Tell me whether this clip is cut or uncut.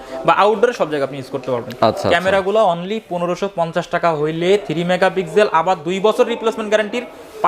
uncut